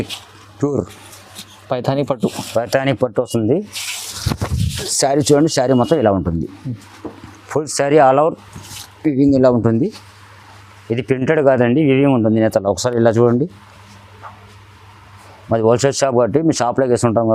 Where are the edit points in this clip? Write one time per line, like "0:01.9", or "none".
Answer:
none